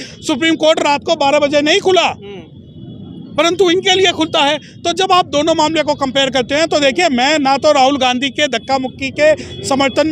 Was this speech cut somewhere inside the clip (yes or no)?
no